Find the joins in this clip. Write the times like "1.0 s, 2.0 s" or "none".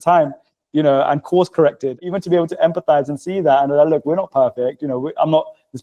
2.0 s